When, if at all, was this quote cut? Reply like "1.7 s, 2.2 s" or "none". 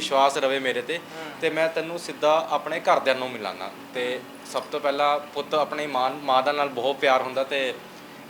none